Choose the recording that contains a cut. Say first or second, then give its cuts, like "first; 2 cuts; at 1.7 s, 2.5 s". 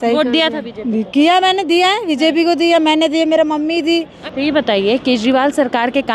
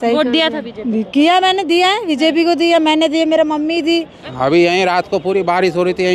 second; 1 cut; at 4.2 s